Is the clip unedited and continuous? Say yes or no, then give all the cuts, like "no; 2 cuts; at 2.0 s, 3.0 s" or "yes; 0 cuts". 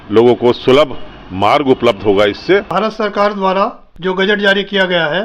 no; 2 cuts; at 2.7 s, 3.9 s